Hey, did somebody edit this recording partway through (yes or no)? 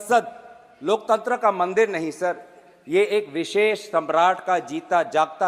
no